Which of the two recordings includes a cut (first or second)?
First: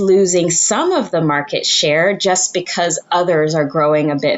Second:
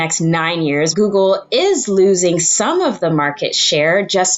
second